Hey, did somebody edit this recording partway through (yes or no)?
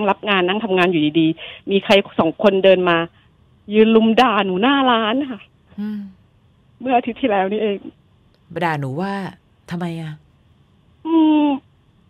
no